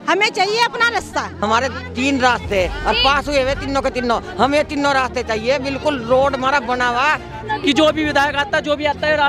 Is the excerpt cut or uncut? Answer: cut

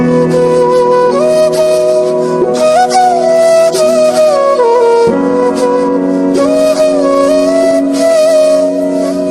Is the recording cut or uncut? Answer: uncut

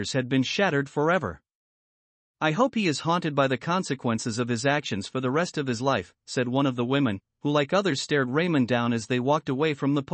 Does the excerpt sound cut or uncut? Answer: cut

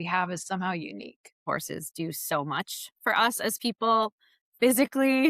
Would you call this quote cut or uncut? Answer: cut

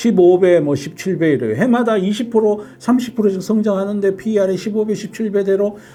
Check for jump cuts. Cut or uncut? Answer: uncut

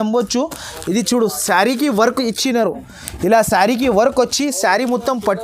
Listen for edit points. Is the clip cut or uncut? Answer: uncut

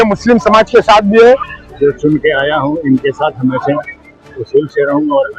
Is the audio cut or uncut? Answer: cut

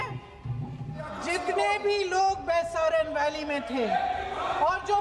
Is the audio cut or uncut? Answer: cut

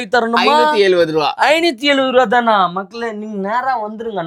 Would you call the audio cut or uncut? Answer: uncut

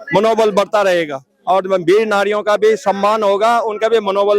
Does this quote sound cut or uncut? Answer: uncut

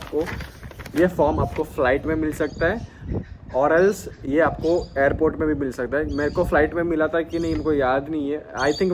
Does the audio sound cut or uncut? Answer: uncut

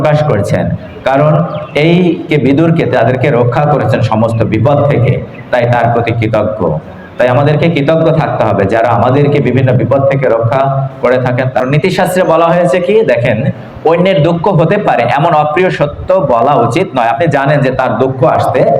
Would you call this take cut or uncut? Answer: cut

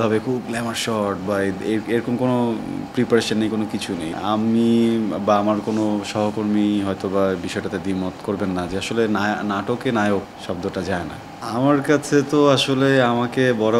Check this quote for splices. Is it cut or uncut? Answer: cut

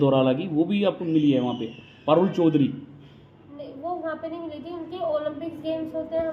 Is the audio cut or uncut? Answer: uncut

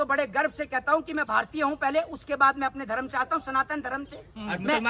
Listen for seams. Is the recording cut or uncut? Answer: uncut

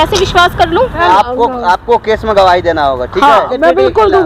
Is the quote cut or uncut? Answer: cut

